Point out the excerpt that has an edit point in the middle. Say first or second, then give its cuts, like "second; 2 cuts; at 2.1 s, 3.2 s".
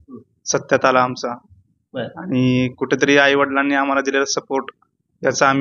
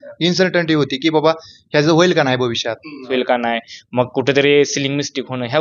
second; 1 cut; at 3.1 s